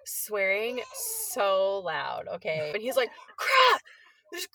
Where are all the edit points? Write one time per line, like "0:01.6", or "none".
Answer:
0:02.7